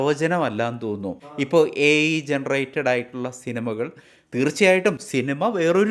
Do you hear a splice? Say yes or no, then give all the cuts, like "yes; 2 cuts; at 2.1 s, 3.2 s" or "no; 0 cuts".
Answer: yes; 1 cut; at 1.2 s